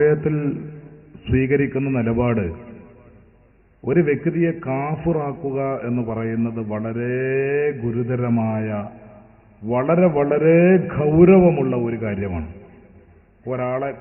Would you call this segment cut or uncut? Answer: uncut